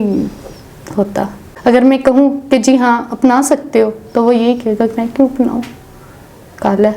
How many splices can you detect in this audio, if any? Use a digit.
1